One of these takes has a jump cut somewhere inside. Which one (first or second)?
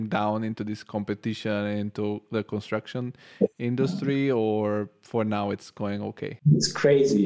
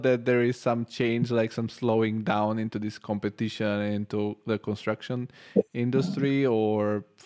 first